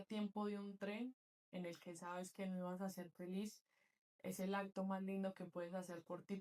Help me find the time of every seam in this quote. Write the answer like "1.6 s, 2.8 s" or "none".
none